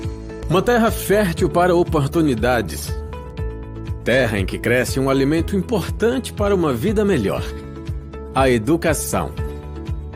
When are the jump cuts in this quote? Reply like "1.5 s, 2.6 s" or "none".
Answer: 1.6 s